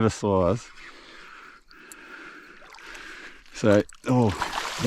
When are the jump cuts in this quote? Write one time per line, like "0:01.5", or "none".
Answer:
none